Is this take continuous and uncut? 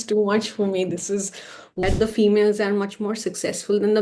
no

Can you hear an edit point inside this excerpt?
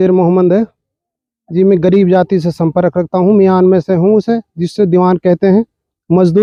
no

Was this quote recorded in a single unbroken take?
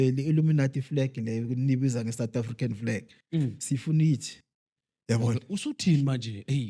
yes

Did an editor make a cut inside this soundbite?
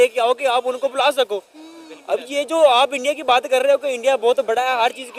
no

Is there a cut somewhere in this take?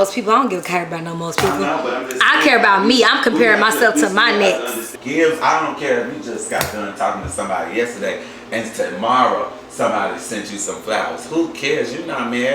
yes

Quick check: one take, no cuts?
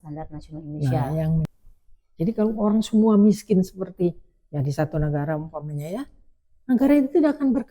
no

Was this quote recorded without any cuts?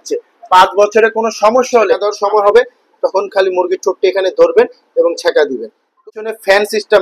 no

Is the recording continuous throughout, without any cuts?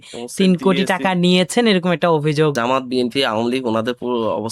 no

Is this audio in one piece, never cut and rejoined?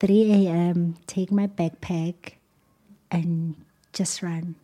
yes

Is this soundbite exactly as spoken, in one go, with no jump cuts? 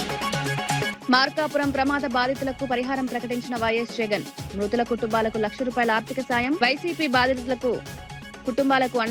yes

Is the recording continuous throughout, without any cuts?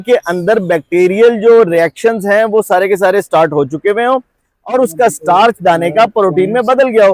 yes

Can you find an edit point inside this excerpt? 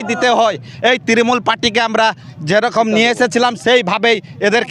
no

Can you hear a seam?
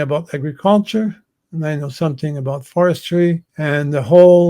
yes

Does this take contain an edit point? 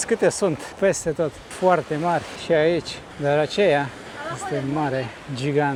no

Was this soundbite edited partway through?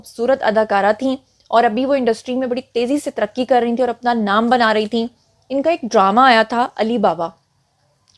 no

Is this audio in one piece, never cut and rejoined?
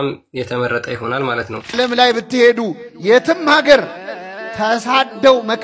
no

